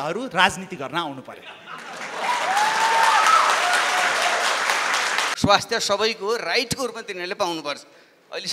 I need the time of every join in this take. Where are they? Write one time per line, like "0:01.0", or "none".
0:05.3